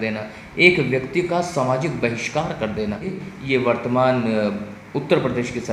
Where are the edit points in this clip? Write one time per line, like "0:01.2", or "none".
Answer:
0:03.1